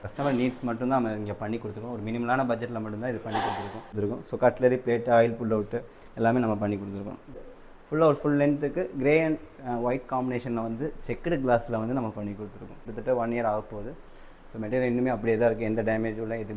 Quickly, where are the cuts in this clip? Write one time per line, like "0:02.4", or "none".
0:03.9
0:07.5
0:12.9